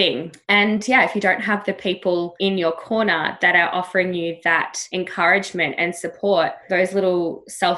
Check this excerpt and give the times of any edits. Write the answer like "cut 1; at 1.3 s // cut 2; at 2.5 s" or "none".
cut 1; at 2.3 s // cut 2; at 4.8 s